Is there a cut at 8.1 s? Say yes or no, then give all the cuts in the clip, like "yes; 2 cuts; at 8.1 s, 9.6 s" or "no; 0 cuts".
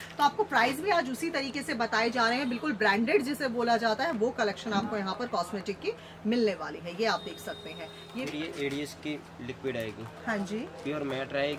yes; 1 cut; at 8.1 s